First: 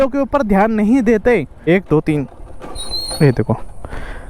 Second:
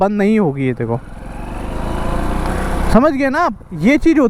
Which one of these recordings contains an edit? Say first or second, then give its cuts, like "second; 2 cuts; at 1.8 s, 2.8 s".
first; 1 cut; at 1.6 s